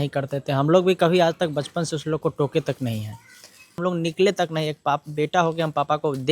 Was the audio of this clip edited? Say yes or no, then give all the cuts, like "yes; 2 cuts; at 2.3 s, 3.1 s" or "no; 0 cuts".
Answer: yes; 1 cut; at 3.7 s